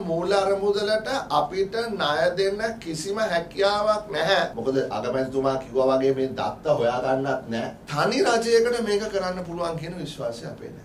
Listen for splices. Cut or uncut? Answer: cut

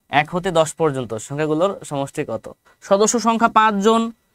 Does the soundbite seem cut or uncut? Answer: cut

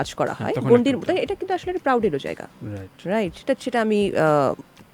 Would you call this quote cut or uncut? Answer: uncut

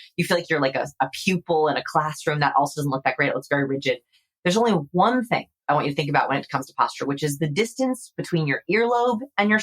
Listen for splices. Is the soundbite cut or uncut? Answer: cut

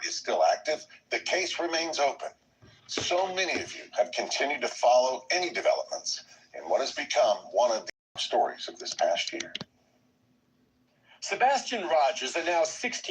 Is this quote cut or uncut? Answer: cut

